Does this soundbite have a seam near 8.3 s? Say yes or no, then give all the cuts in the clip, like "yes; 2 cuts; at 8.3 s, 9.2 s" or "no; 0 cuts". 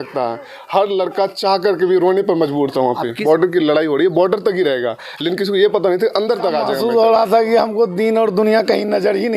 no; 2 cuts; at 3.2 s, 6.7 s